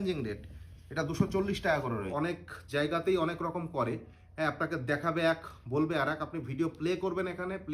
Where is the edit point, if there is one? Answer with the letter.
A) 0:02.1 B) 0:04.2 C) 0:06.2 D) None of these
A